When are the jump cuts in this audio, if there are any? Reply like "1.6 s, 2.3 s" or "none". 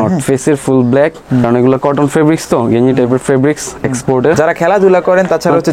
1.4 s, 4.3 s